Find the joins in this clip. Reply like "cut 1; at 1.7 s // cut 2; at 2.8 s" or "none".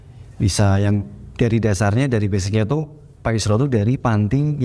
none